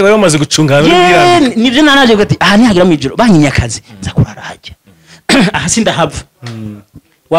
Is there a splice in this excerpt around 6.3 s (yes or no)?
no